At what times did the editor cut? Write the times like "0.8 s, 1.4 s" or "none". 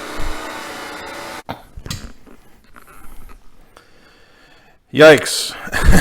1.4 s